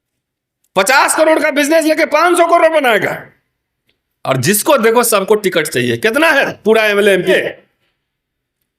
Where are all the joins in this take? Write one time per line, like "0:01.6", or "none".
0:07.3